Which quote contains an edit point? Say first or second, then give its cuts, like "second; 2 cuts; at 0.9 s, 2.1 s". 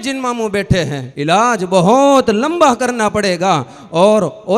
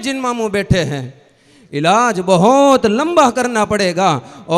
first; 1 cut; at 1.0 s